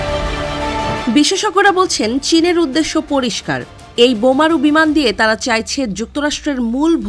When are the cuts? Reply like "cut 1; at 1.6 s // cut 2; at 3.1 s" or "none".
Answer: cut 1; at 0.9 s

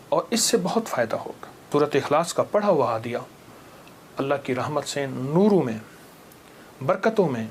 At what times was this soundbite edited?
cut 1; at 1.7 s

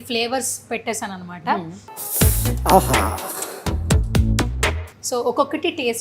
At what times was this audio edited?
none

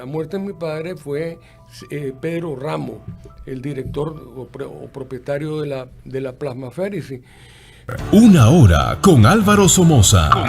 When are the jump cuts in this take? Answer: cut 1; at 7.8 s

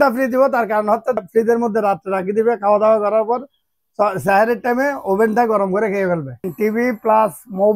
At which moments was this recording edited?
cut 1; at 1.2 s // cut 2; at 6.5 s

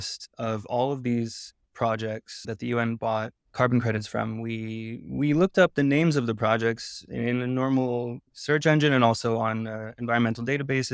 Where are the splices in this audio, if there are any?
cut 1; at 2.4 s // cut 2; at 3.4 s // cut 3; at 8.3 s

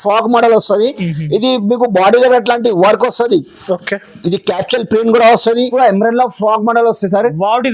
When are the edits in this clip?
cut 1; at 5.7 s

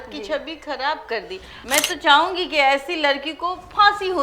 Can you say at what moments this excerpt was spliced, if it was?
cut 1; at 1.5 s

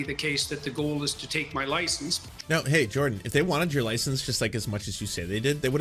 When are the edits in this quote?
cut 1; at 2.2 s

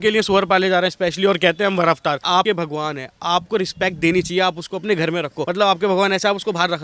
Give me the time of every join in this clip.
cut 1; at 2.4 s // cut 2; at 5.4 s

